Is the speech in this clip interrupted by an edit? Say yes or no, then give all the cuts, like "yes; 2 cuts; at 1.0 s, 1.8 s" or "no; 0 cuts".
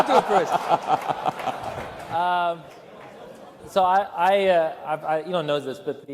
yes; 1 cut; at 4.7 s